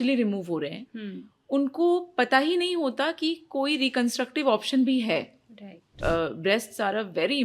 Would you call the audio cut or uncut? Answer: cut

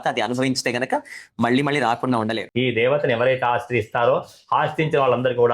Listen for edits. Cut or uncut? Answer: cut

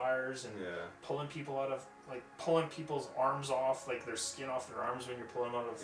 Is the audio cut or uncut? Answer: uncut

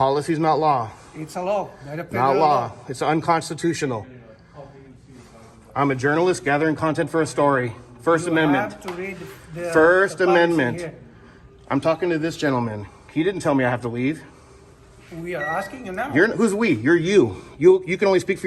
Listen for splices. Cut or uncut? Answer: uncut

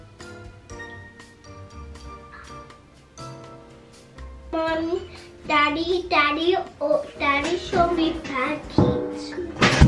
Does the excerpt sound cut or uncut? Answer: uncut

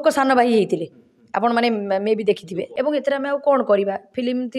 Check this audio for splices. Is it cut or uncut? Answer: cut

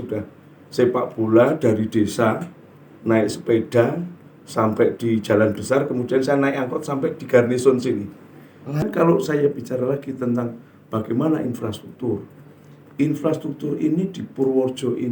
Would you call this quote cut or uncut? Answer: cut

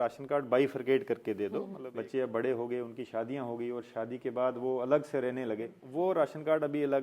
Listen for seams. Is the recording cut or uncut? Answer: cut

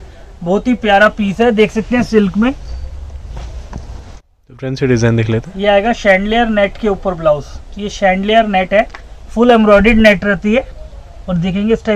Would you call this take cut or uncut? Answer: cut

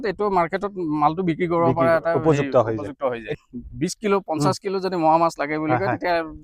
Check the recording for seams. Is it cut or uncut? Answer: cut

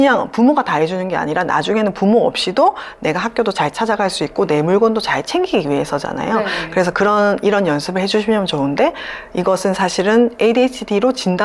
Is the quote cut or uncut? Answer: uncut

